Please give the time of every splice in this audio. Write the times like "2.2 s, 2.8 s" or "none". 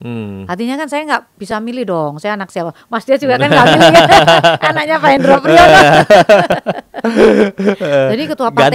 6.5 s

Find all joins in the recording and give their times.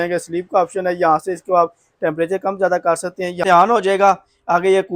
3.4 s

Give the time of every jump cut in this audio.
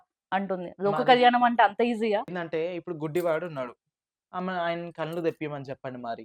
2.4 s

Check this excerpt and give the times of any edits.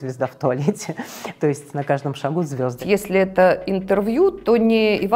2.8 s

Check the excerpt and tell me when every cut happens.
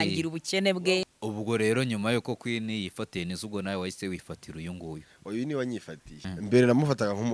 1.1 s, 6.1 s

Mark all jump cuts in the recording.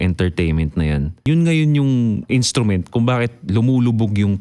1.3 s, 2.2 s

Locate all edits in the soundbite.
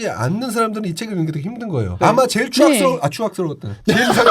2.0 s

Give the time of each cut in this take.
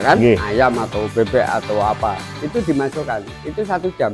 none

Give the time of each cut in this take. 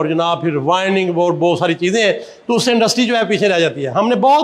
none

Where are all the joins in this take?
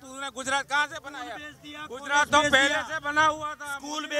none

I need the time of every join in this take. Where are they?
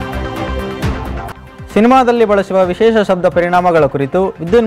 none

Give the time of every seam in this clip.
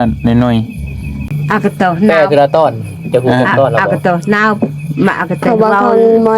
1.3 s

